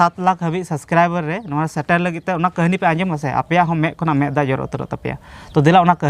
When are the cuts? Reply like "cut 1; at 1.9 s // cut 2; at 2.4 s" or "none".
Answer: none